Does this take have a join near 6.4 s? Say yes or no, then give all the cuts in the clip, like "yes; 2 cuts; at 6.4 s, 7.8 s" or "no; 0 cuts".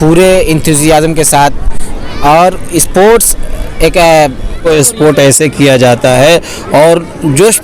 no; 1 cut; at 4.6 s